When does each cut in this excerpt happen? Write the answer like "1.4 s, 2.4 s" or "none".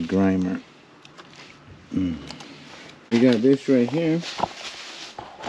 3.1 s